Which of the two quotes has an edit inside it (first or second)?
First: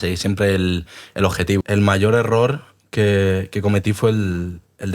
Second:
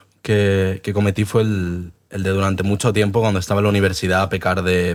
first